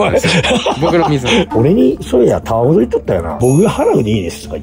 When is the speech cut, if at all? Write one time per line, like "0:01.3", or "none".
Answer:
0:01.5
0:03.3